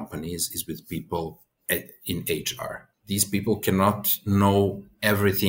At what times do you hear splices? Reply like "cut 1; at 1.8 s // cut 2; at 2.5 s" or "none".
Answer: cut 1; at 1.5 s // cut 2; at 2.9 s